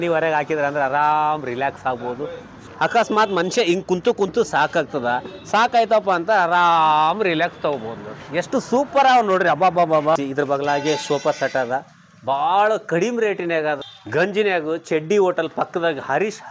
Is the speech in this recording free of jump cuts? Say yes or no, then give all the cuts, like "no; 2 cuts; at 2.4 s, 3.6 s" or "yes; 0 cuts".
no; 3 cuts; at 2.6 s, 10.1 s, 13.9 s